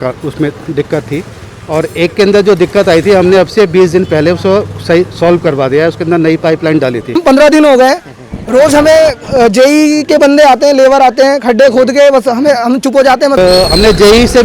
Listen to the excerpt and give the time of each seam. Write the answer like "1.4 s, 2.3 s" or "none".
7.2 s, 13.4 s